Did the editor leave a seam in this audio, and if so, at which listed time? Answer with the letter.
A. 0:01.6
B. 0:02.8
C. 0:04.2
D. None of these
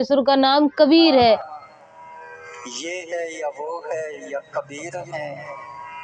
A